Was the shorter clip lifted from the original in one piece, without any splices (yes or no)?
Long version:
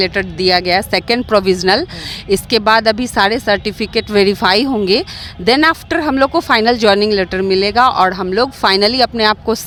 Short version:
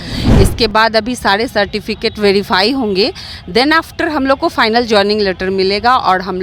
yes